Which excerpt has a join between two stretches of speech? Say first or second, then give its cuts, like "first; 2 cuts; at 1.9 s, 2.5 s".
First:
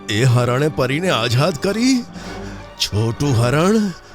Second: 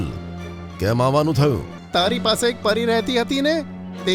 second; 1 cut; at 1.7 s